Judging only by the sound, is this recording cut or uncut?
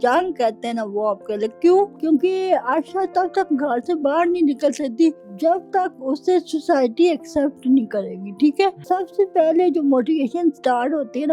cut